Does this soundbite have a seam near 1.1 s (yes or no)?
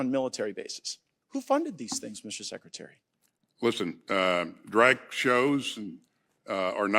yes